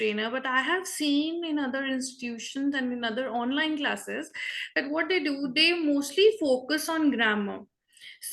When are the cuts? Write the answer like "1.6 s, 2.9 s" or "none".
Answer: none